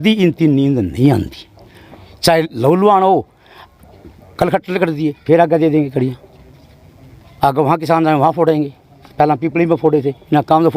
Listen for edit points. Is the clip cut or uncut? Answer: uncut